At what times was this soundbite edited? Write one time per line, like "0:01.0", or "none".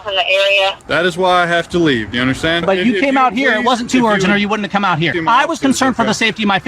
0:02.6
0:05.2

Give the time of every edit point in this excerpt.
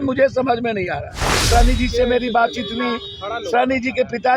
0:01.5

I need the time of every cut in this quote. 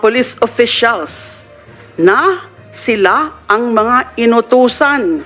none

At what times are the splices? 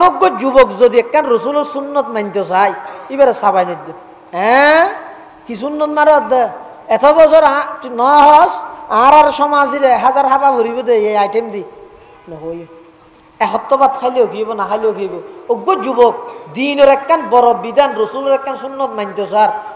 none

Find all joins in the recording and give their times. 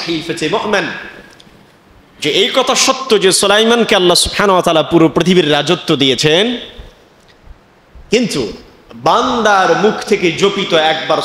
none

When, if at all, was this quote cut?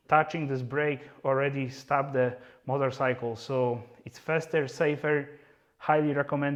none

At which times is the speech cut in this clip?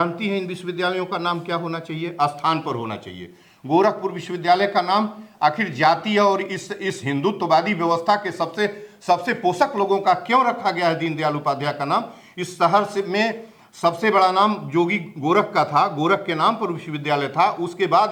none

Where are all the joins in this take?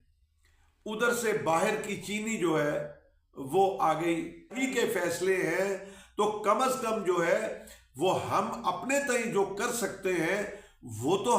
0:04.6

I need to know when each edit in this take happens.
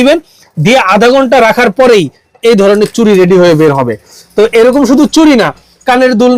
none

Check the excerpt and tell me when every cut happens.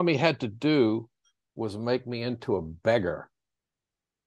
none

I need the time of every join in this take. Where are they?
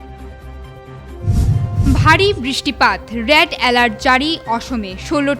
0:01.8

